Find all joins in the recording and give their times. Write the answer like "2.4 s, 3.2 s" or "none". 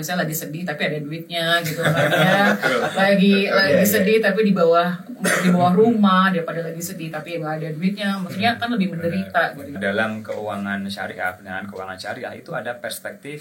9.7 s